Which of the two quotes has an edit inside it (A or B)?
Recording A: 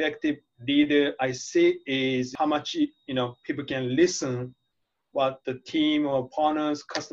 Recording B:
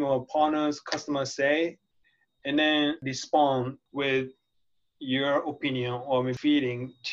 B